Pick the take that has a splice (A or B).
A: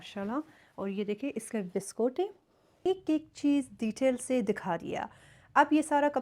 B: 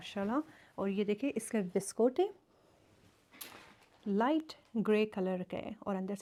A